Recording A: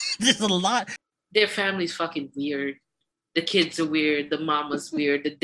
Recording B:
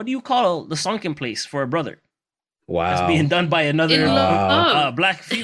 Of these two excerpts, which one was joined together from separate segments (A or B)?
A